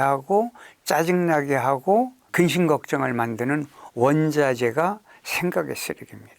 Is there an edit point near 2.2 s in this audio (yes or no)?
yes